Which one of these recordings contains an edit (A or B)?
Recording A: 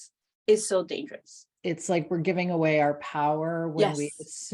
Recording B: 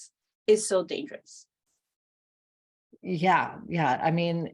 A